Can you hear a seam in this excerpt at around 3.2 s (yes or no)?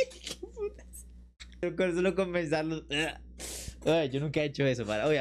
no